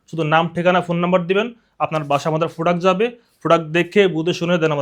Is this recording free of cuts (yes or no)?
yes